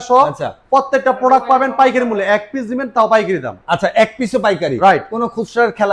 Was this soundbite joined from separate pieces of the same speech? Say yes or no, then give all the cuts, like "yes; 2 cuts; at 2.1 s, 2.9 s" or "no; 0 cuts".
no; 0 cuts